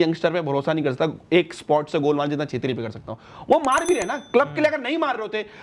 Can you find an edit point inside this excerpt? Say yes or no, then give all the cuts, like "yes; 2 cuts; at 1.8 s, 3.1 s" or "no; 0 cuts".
no; 0 cuts